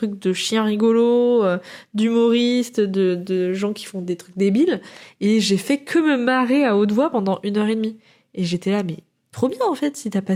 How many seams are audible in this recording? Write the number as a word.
zero